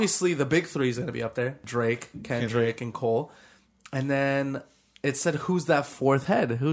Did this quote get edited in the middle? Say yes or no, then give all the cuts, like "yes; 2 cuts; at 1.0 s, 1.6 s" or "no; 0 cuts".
yes; 1 cut; at 1.6 s